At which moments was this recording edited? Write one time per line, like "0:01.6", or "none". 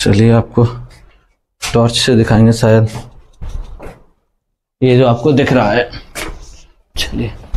none